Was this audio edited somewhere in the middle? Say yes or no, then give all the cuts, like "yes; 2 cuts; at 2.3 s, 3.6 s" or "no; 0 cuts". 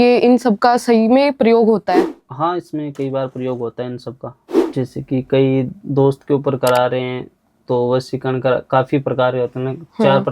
yes; 1 cut; at 4.8 s